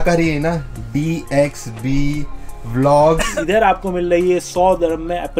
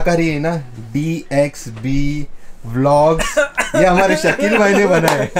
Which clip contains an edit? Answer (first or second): first